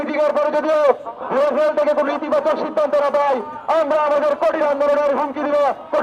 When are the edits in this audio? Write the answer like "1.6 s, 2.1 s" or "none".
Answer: none